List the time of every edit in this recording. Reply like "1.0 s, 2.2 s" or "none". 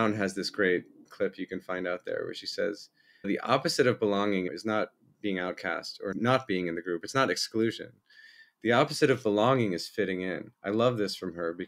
1.1 s, 3.3 s, 4.5 s, 6.1 s